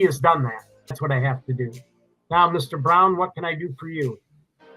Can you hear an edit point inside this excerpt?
yes; 1 cut; at 1.0 s

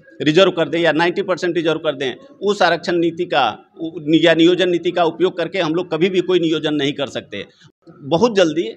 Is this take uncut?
no; 1 cut; at 7.6 s

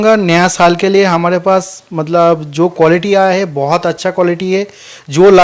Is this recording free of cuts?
yes; 0 cuts

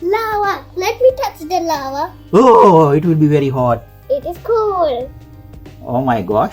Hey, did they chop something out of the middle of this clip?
yes; 1 cut; at 3.9 s

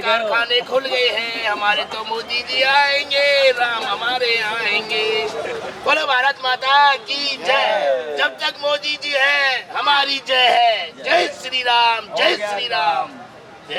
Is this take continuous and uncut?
yes; 0 cuts

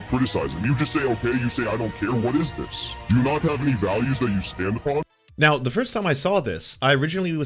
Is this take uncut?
no; 1 cut; at 5.2 s

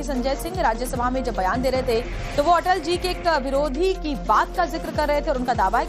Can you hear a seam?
yes; 1 cut; at 1.2 s

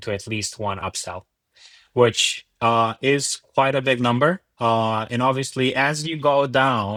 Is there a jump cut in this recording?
no; 0 cuts

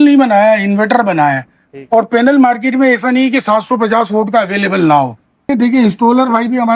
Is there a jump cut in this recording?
yes; 1 cut; at 5.5 s

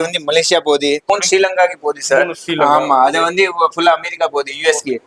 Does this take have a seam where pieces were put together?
yes; 1 cut; at 1.1 s

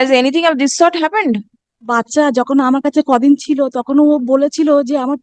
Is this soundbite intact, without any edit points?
no; 1 cut; at 1.9 s

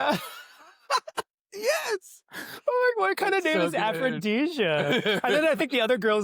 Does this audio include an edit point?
no; 0 cuts

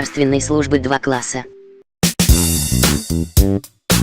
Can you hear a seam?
yes; 1 cut; at 1.5 s

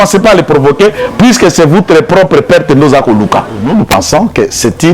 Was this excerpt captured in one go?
no; 1 cut; at 3.6 s

